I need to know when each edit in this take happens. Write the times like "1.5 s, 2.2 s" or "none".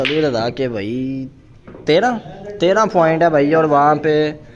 none